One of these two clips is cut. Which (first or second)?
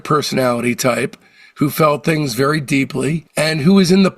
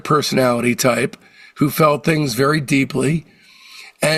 first